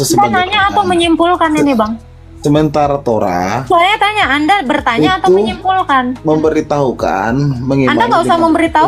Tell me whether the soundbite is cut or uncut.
uncut